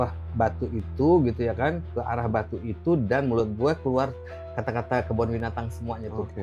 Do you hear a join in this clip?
no; 0 cuts

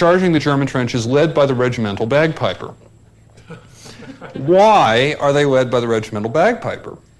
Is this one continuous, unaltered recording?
no; 1 cut; at 5.6 s

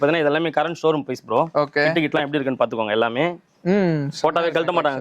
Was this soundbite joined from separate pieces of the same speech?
no; 0 cuts

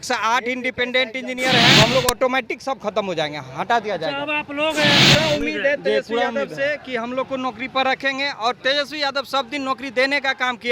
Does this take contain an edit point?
yes; 2 cuts; at 1.8 s, 5.1 s

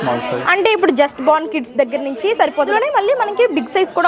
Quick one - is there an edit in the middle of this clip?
yes; 1 cut; at 2.7 s

